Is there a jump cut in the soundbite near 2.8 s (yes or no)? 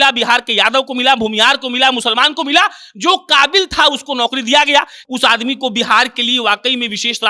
no